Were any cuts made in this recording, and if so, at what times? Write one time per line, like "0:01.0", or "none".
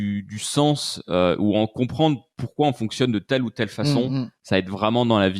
none